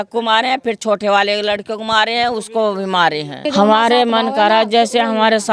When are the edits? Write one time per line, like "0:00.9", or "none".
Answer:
0:03.4